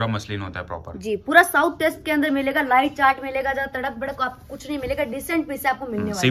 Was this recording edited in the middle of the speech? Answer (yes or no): no